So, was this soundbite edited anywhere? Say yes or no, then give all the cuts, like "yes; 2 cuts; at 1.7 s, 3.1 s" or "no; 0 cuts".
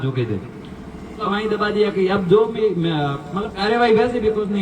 yes; 1 cut; at 1.2 s